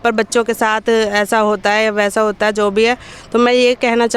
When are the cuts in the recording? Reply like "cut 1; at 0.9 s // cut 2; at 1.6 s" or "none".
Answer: none

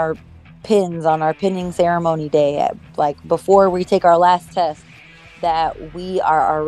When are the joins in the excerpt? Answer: none

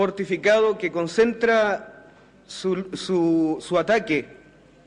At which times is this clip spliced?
cut 1; at 3.9 s

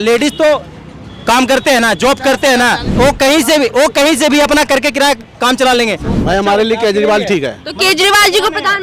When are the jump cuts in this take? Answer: cut 1; at 2.9 s // cut 2; at 6.1 s

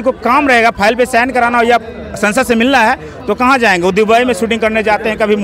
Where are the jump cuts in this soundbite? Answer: none

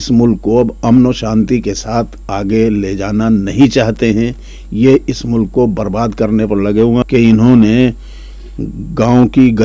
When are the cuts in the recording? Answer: cut 1; at 7.0 s

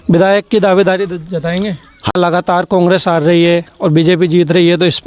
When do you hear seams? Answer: cut 1; at 2.1 s

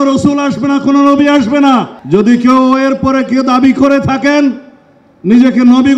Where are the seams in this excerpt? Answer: cut 1; at 1.9 s

